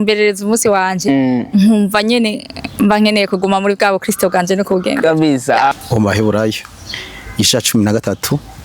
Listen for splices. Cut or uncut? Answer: cut